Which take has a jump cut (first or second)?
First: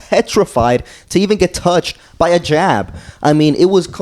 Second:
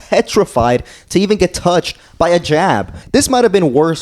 second